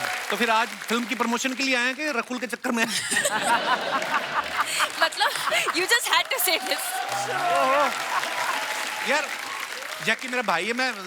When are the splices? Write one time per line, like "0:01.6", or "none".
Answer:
none